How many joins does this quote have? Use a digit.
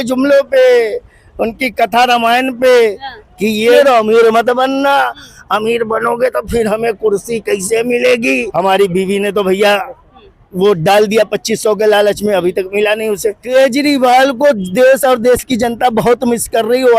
3